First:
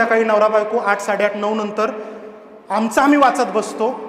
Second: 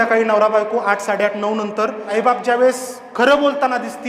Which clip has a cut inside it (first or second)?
second